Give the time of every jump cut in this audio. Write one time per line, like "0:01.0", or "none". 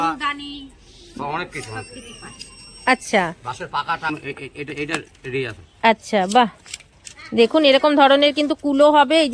0:04.1